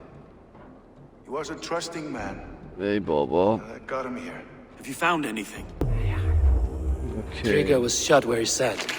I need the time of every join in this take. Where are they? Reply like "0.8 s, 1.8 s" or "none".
5.8 s

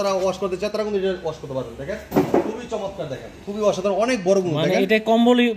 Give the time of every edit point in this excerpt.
none

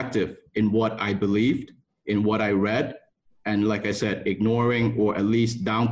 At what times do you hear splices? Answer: none

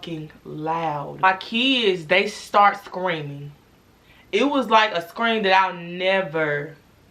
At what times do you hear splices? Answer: 1.2 s

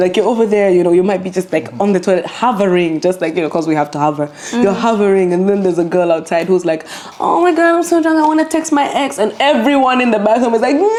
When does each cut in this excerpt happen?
none

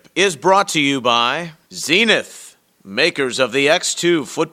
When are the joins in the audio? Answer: 1.5 s

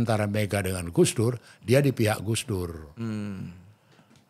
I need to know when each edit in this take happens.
none

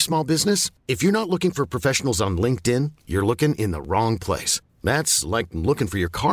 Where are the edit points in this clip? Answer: none

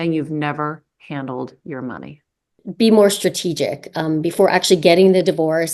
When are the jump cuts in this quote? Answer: 2.6 s

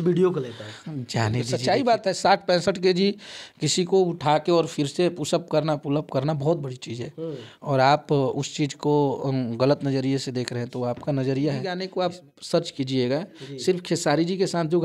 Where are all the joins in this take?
1.5 s, 11.8 s

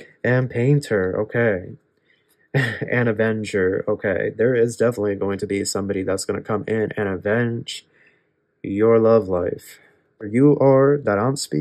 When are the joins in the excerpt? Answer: 10.2 s

